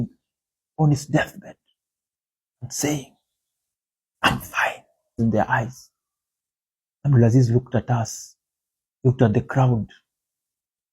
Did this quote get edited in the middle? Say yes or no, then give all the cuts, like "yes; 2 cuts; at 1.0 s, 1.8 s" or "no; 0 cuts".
yes; 1 cut; at 5.2 s